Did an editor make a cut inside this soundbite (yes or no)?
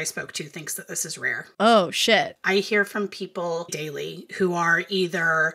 yes